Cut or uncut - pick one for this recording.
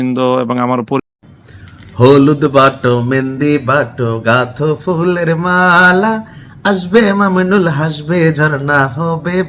cut